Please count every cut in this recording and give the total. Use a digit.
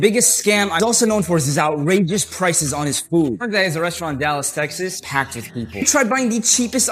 2